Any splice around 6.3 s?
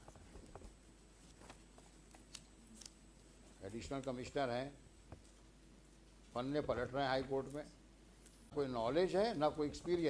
no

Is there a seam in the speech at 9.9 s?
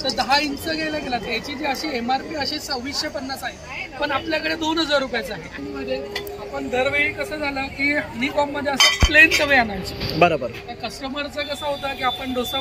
no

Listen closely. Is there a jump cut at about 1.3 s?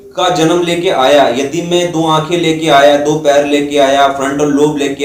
no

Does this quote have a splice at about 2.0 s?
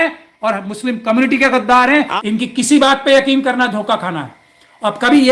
yes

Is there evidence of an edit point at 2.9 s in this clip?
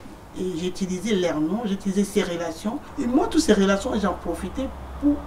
yes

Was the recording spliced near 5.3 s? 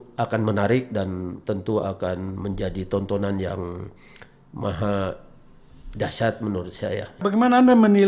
no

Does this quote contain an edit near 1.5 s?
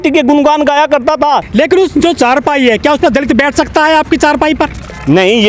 yes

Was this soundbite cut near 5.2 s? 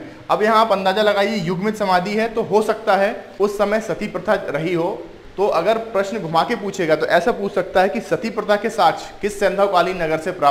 yes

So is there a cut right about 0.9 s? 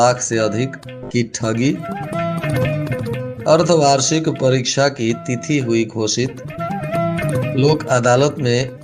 no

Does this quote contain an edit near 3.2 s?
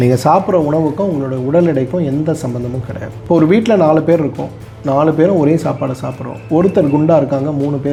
no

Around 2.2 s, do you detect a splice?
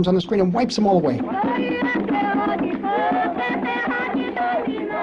yes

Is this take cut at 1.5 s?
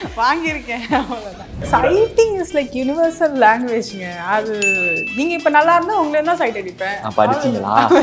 yes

